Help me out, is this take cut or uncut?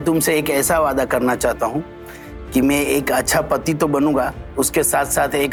uncut